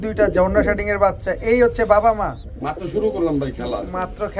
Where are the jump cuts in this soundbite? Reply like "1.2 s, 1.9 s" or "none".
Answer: none